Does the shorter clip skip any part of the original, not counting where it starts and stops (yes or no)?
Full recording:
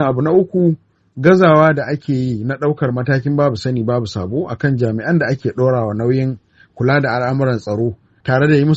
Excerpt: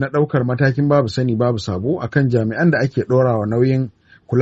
no